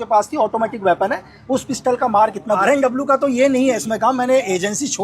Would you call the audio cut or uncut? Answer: cut